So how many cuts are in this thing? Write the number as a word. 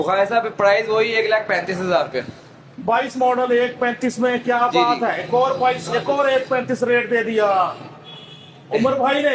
zero